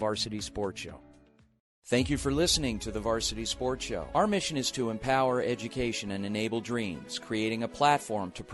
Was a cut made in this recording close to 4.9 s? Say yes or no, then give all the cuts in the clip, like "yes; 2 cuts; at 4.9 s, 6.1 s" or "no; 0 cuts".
no; 1 cut; at 1.6 s